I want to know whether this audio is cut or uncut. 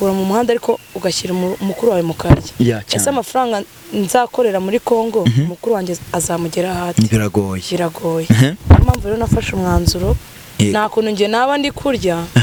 uncut